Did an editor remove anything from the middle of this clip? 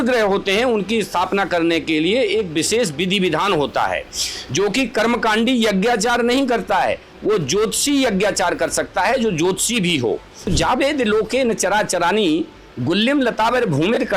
yes; 1 cut; at 10.5 s

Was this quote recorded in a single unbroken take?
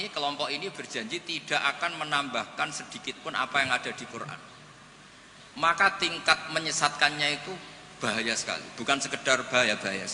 yes; 0 cuts

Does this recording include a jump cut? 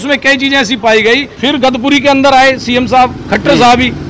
yes; 1 cut; at 1.3 s

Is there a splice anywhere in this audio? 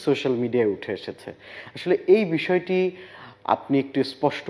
no; 0 cuts

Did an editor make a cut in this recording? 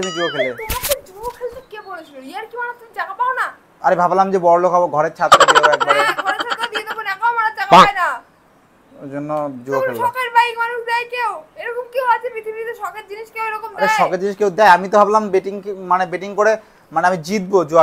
no; 0 cuts

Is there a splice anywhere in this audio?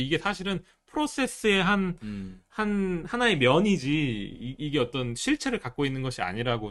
no; 0 cuts

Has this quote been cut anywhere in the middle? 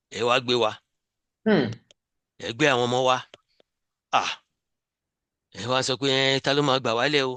no; 0 cuts

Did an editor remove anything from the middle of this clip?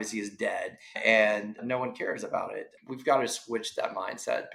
yes; 1 cut; at 2.7 s

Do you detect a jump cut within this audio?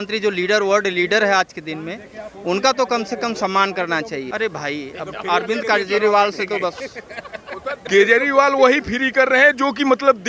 yes; 2 cuts; at 4.2 s, 7.8 s

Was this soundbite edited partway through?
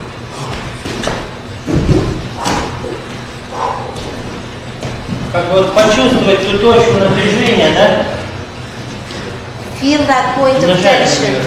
no; 0 cuts

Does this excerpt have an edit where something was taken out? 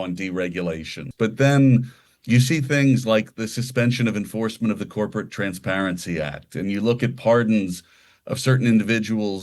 yes; 1 cut; at 1.0 s

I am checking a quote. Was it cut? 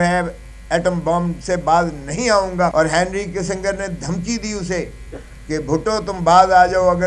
yes; 1 cut; at 2.7 s

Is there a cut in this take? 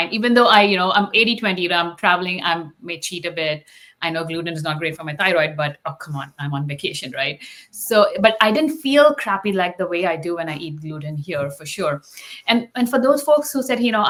no; 0 cuts

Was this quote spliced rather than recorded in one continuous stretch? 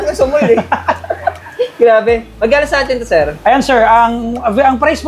no; 0 cuts

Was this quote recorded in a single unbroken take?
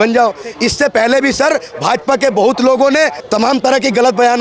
no; 1 cut; at 3.2 s

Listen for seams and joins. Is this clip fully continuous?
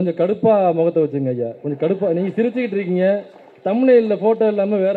yes; 0 cuts

